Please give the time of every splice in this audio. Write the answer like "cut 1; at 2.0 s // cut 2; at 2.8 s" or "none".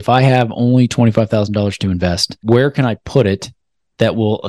cut 1; at 2.3 s